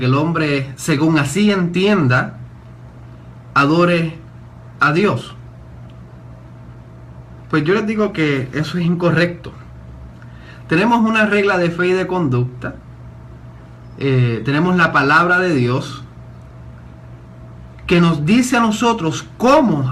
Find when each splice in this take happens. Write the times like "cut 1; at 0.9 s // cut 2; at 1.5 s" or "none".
cut 1; at 7.4 s